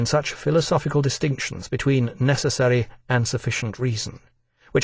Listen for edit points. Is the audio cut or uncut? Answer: cut